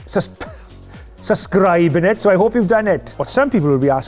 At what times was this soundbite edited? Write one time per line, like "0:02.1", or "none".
0:03.1